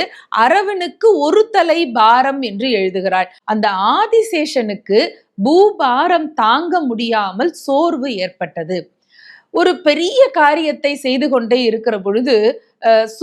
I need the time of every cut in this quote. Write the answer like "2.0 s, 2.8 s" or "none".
3.4 s